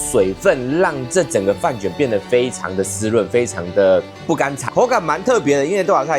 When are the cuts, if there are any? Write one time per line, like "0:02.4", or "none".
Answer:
0:04.6

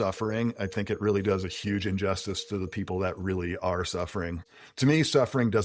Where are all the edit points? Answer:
0:04.4

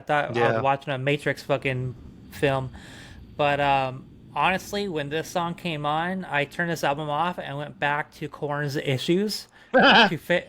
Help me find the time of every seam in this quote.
none

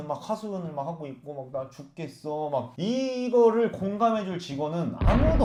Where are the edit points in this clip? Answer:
none

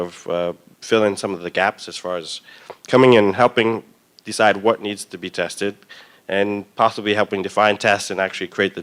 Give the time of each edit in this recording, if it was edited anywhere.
none

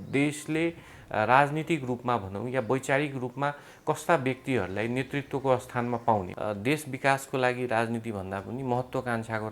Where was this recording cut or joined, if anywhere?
0:06.3

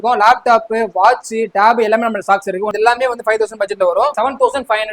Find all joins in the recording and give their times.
0:02.7
0:04.1

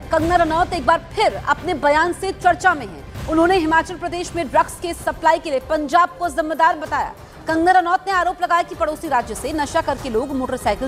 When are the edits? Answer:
none

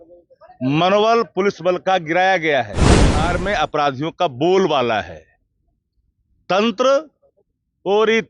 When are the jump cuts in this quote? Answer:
0:03.2

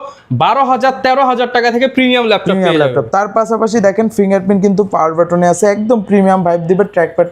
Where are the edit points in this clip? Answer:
none

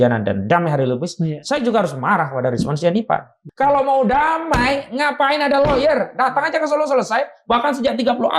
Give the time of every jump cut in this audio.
0:03.4

